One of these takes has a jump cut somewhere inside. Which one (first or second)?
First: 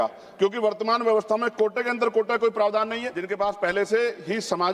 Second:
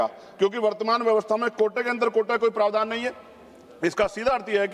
first